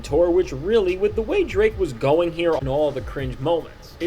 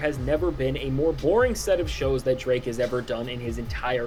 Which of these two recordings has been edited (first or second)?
first